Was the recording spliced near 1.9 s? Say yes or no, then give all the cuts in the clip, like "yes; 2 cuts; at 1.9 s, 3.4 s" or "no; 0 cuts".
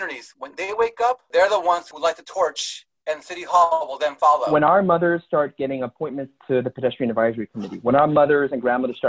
yes; 3 cuts; at 1.2 s, 1.9 s, 4.4 s